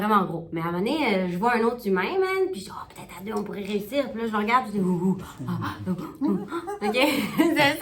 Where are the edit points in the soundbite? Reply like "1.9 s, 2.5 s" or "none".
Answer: none